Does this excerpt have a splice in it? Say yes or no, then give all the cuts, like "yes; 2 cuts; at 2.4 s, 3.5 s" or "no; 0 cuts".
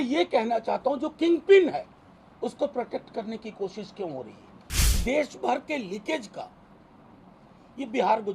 yes; 1 cut; at 5.0 s